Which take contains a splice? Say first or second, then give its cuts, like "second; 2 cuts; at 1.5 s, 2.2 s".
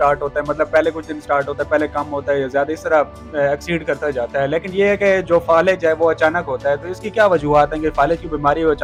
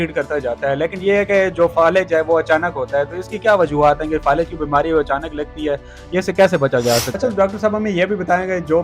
second; 1 cut; at 7.2 s